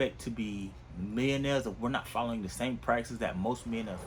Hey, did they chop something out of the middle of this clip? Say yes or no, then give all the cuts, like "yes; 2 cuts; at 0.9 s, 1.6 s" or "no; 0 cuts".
no; 0 cuts